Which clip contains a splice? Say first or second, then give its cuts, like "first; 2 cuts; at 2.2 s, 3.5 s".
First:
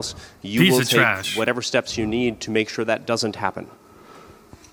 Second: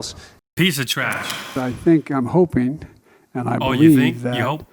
second; 1 cut; at 1.4 s